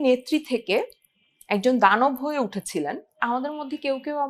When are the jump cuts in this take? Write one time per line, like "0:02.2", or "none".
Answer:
0:03.2